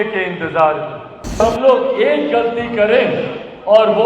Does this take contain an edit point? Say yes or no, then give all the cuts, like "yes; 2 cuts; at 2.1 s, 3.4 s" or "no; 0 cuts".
yes; 1 cut; at 1.4 s